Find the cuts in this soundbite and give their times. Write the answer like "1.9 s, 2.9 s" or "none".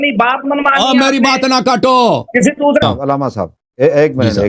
2.8 s